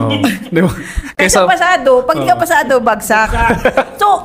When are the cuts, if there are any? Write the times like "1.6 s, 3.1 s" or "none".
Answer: 1.0 s